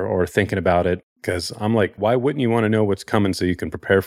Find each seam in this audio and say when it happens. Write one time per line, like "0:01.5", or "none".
0:02.0